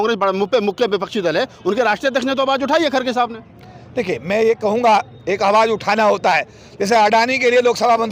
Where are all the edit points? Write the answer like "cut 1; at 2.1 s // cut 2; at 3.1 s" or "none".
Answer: none